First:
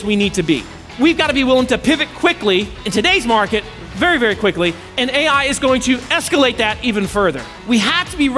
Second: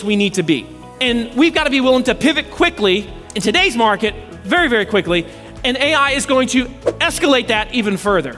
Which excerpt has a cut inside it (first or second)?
first